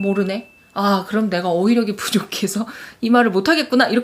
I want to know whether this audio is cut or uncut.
uncut